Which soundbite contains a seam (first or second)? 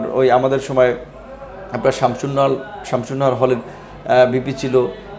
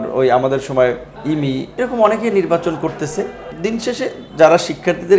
second